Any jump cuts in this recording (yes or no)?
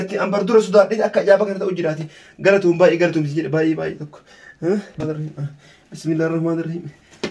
no